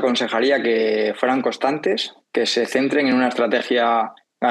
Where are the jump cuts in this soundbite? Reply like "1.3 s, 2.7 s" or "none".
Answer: 2.2 s